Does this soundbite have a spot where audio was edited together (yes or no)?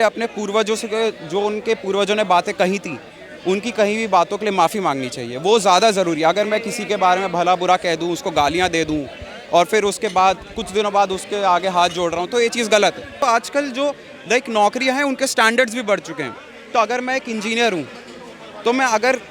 yes